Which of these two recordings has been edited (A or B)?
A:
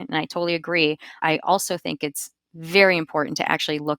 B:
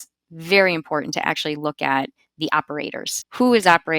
A